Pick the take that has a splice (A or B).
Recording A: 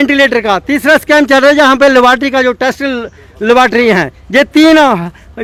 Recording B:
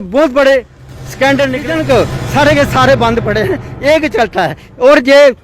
B